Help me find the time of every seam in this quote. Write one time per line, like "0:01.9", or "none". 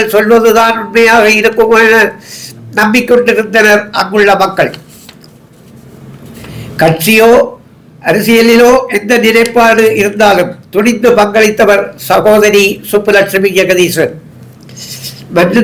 none